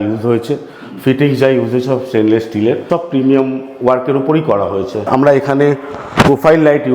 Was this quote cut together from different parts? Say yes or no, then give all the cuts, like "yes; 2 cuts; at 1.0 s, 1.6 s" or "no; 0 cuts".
yes; 2 cuts; at 2.8 s, 5.0 s